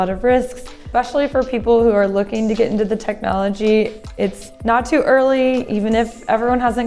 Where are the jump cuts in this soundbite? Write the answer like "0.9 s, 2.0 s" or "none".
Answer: 0.9 s, 4.5 s